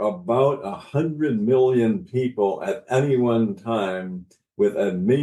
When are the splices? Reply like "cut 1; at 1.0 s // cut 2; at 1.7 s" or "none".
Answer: none